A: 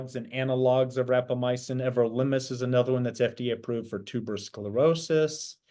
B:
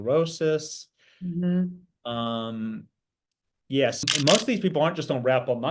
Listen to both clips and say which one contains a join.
B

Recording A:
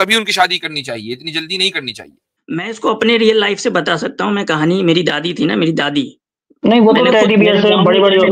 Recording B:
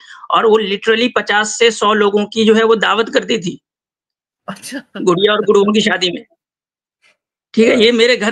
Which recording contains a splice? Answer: A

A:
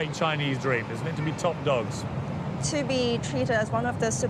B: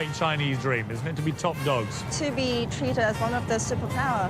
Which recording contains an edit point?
B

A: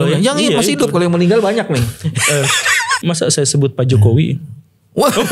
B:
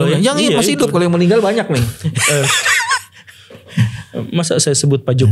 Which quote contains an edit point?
A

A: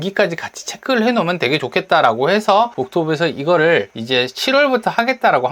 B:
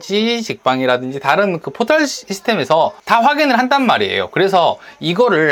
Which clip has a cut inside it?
A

